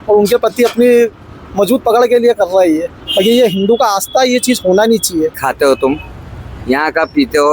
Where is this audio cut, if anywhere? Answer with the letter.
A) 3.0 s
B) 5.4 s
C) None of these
B